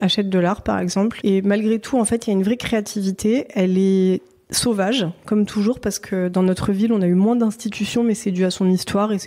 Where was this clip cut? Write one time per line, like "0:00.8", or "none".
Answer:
0:01.2